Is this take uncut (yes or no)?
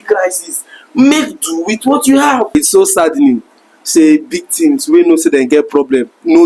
no